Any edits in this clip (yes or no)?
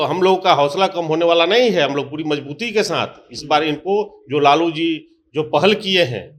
no